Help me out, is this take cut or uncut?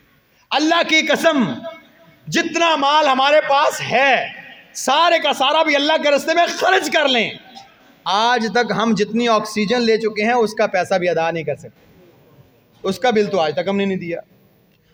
uncut